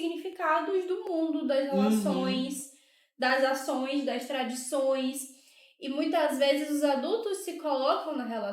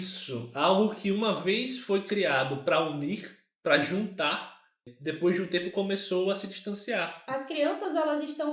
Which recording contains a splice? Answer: second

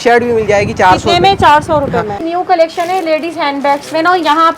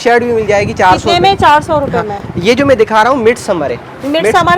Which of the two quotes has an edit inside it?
first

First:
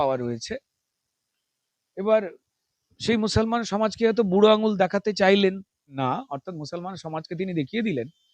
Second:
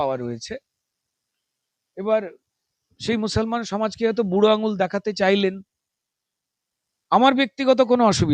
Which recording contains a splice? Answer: first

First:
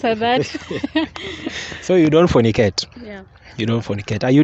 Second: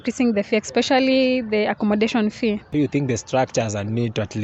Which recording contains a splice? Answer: second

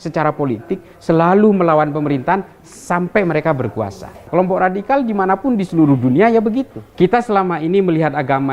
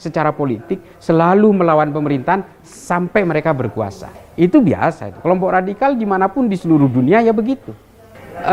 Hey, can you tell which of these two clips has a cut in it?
first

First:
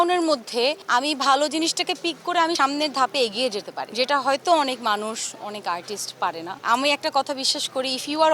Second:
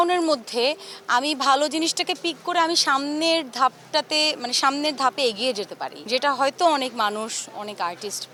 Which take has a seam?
first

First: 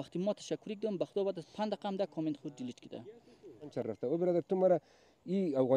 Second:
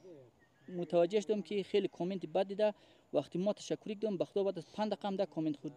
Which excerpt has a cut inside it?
first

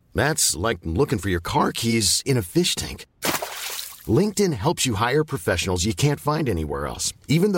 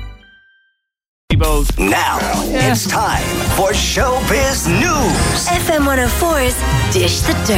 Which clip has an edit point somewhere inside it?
second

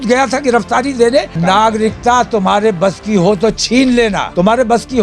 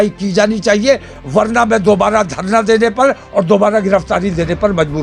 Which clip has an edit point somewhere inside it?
first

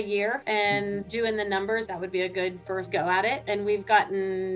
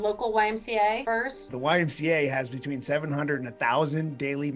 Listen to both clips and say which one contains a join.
second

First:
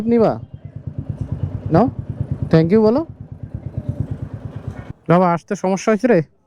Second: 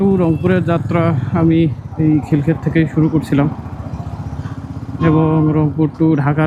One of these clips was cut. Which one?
first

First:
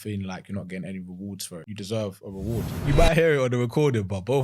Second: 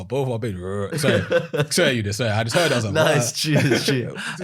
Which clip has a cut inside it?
first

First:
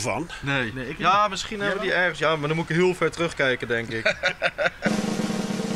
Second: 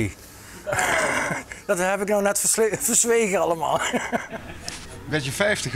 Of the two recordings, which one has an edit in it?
first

